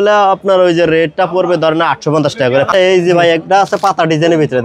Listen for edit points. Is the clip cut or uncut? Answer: cut